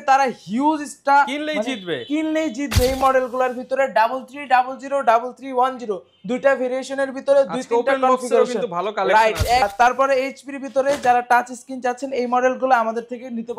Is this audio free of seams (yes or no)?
no